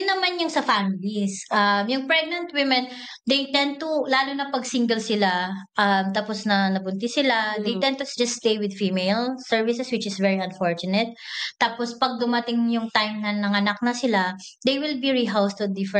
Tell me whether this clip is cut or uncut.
uncut